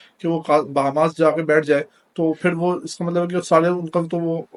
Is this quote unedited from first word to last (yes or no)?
yes